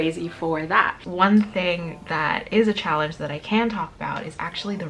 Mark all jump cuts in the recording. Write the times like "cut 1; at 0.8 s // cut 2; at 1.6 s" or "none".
cut 1; at 0.9 s

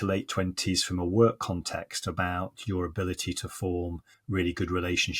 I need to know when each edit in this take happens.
cut 1; at 4.1 s

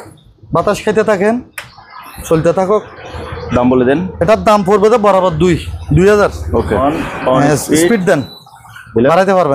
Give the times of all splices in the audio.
cut 1; at 6.8 s

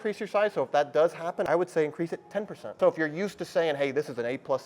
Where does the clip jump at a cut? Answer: cut 1; at 1.5 s // cut 2; at 2.8 s

